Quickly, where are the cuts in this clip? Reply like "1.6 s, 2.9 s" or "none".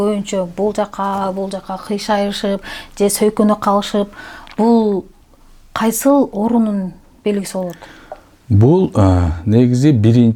none